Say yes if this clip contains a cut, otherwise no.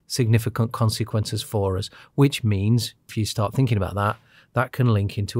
yes